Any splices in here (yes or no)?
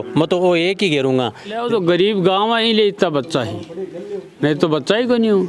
yes